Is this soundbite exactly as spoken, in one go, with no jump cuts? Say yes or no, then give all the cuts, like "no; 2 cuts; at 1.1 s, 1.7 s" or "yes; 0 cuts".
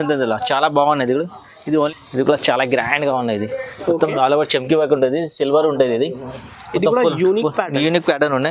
no; 1 cut; at 1.9 s